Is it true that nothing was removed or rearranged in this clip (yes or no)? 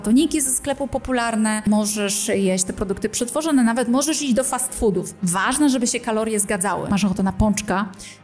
no